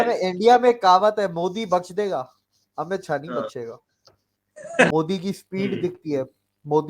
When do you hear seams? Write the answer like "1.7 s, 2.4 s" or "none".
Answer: 4.9 s

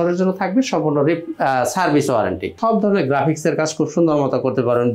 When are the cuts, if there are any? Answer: 2.5 s

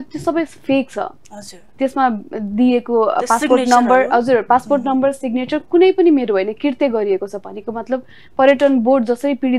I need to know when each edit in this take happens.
none

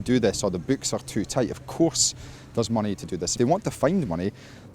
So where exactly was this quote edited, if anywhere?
3.3 s

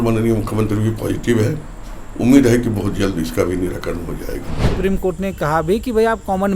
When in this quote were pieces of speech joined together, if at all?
4.6 s

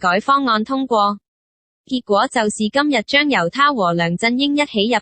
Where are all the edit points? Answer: 2.9 s

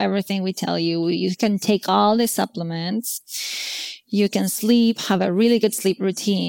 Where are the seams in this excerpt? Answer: none

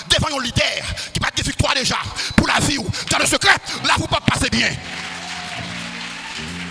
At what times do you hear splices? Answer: none

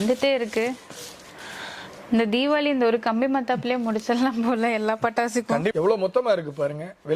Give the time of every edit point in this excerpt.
5.7 s

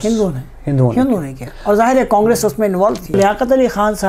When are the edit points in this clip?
3.1 s

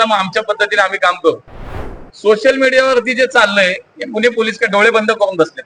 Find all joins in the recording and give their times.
1.8 s

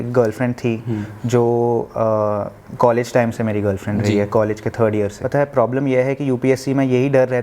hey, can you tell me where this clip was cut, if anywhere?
5.2 s

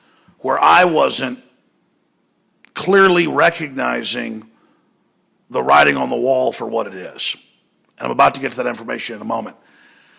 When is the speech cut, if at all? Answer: none

